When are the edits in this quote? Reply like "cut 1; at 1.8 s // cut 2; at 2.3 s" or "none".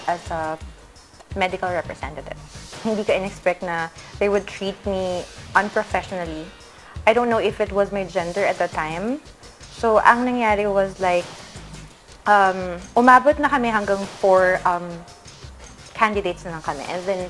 none